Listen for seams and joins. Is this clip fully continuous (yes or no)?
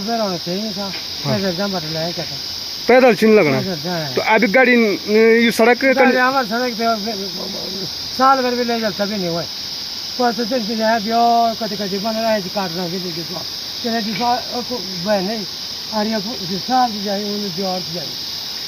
yes